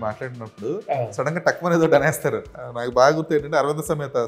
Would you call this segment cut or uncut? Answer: cut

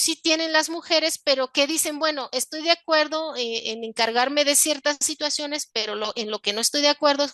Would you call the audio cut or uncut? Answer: uncut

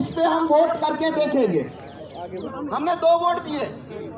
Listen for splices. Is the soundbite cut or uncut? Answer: cut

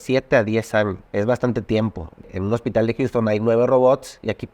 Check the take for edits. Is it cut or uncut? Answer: cut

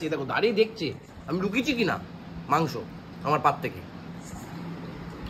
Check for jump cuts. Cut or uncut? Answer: uncut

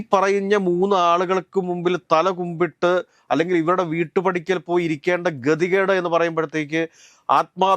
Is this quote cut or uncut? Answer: uncut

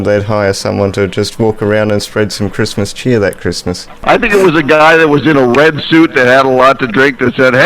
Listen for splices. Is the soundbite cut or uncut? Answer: cut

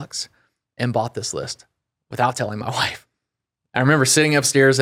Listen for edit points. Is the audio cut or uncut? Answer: cut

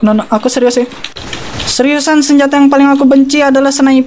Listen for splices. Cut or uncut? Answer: cut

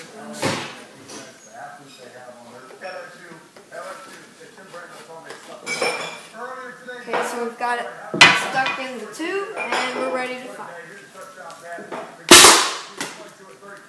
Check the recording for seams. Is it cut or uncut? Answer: uncut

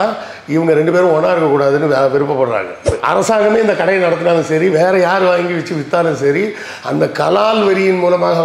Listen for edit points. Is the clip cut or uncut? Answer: cut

